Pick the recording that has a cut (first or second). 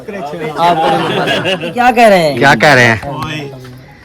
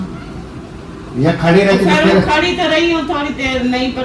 first